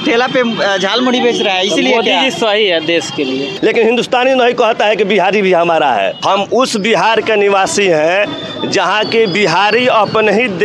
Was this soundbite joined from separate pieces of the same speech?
yes; 2 cuts; at 3.5 s, 6.2 s

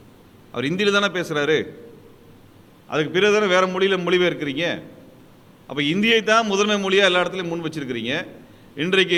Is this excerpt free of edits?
yes; 0 cuts

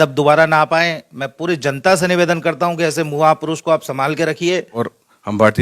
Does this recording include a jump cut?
yes; 1 cut; at 4.7 s

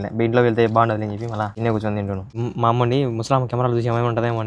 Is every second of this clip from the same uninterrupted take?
no; 2 cuts; at 1.5 s, 2.3 s

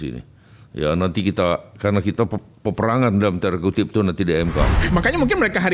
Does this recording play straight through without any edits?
no; 1 cut; at 4.8 s

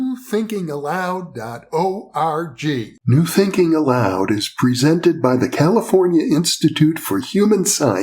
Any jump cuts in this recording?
yes; 1 cut; at 2.9 s

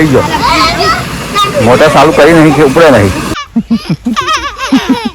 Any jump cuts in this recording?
yes; 1 cut; at 3.4 s

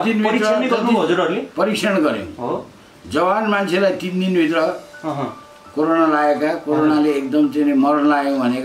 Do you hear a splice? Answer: no; 0 cuts

